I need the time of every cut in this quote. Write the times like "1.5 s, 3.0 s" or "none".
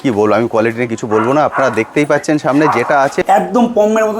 3.2 s